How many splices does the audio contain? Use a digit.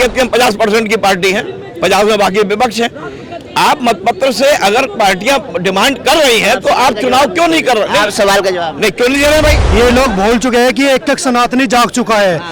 1